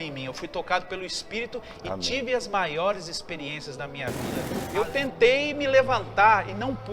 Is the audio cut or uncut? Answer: cut